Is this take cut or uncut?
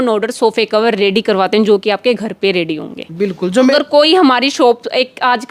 cut